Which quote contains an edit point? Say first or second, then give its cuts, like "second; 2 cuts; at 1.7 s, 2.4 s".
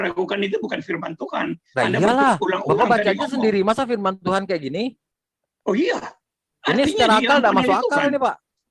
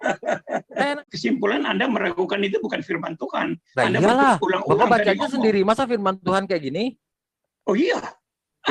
second; 1 cut; at 1.0 s